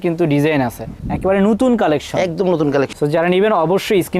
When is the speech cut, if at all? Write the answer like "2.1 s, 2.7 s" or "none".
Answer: 2.9 s